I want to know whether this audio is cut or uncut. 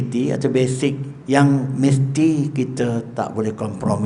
cut